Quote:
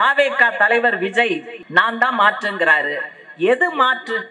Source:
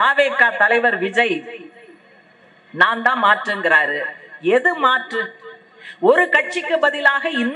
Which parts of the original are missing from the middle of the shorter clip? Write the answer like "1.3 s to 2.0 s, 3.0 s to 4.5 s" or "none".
1.5 s to 2.6 s